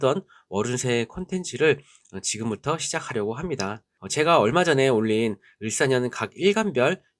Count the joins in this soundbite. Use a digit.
1